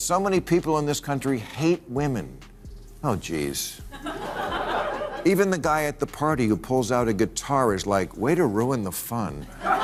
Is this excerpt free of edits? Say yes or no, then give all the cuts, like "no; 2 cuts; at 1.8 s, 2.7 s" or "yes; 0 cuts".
yes; 0 cuts